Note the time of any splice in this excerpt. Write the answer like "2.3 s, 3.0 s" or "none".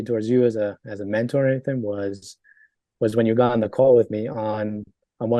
none